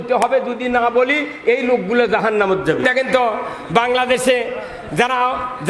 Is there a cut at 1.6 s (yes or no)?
no